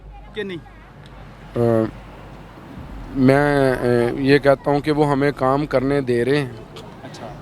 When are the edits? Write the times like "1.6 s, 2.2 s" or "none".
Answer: none